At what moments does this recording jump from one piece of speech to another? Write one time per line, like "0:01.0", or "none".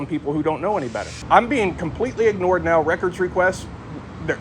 0:01.2